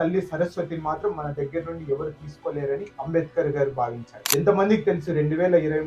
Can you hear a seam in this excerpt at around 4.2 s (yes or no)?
yes